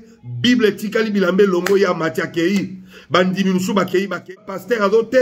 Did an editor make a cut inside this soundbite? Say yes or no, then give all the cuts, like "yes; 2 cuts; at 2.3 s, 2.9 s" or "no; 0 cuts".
yes; 1 cut; at 4.3 s